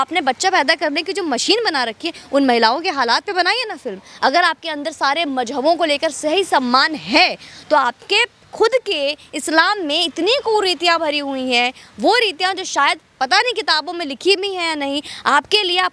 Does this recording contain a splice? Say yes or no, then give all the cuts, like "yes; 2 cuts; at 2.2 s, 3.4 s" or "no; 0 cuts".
no; 0 cuts